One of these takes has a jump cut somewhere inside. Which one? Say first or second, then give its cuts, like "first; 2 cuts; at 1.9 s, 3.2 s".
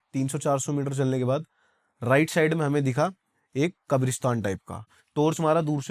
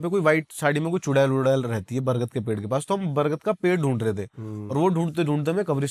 first; 1 cut; at 5.0 s